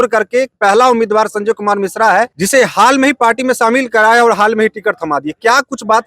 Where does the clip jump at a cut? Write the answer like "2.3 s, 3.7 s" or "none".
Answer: 2.4 s